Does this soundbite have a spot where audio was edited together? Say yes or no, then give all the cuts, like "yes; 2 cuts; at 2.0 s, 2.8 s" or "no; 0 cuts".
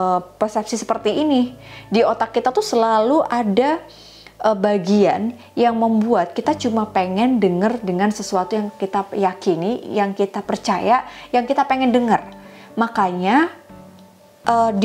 no; 0 cuts